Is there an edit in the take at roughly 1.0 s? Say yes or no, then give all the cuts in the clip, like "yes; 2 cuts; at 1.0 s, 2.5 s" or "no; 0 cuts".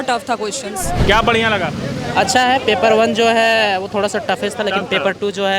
yes; 1 cut; at 1.0 s